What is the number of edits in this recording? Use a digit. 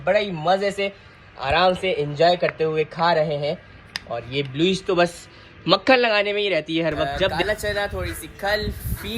1